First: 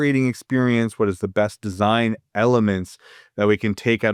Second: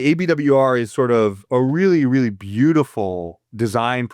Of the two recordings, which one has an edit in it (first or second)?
second